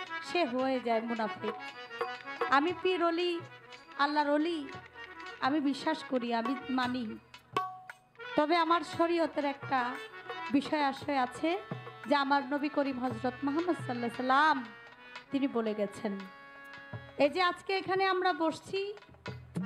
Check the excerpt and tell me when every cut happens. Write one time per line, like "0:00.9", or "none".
none

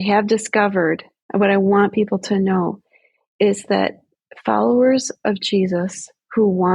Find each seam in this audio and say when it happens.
0:01.1

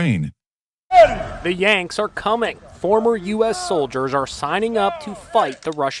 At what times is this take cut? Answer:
0:00.9

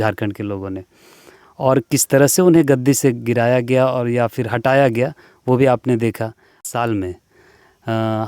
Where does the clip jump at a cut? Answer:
0:06.6

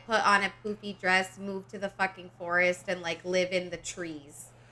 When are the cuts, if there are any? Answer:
none

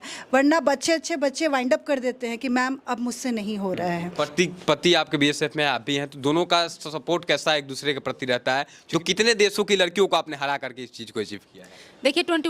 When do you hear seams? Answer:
0:04.1
0:08.8

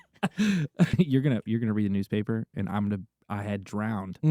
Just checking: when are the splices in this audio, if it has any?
0:00.9

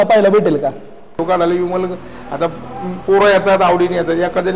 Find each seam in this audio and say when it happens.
0:01.1

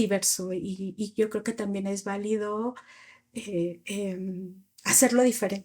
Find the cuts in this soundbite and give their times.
none

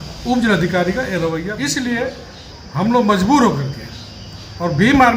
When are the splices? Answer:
0:01.6

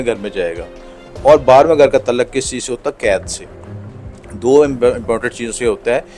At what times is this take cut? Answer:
none

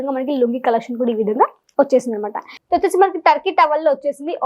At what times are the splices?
0:02.6

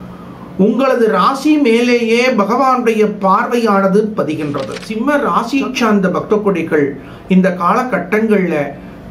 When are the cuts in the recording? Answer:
0:05.0

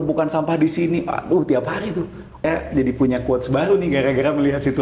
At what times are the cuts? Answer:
0:02.4

